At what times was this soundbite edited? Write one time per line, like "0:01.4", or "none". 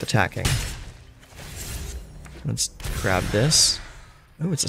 none